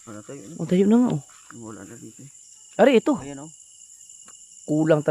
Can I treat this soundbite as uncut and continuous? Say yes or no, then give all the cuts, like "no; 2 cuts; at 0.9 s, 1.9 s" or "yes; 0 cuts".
yes; 0 cuts